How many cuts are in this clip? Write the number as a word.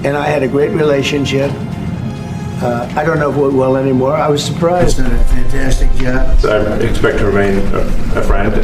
one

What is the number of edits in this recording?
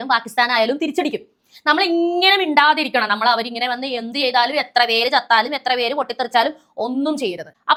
zero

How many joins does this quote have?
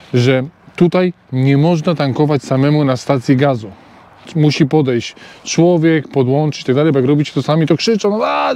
zero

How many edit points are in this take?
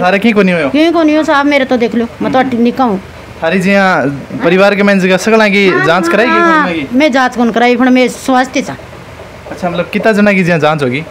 zero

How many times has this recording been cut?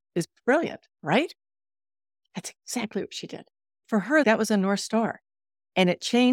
two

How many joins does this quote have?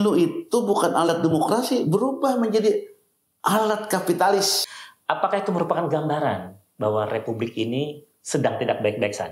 one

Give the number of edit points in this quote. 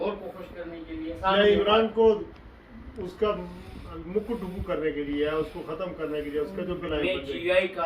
two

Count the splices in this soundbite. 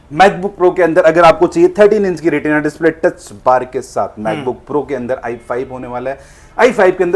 zero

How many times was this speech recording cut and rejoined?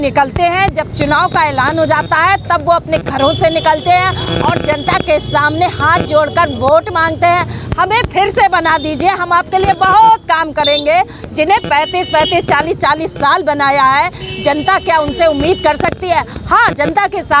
zero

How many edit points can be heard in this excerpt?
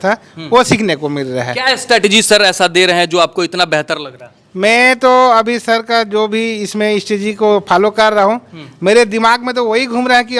zero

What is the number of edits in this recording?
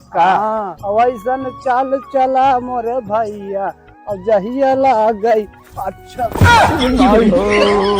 zero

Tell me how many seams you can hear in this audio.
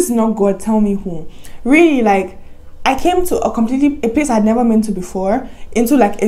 zero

